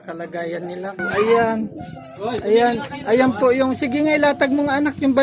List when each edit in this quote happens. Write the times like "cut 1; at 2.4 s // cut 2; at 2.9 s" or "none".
cut 1; at 1.0 s